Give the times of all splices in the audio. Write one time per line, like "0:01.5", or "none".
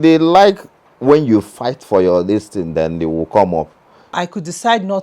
0:04.1